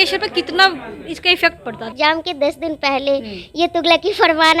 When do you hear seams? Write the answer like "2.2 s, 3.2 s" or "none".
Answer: 1.9 s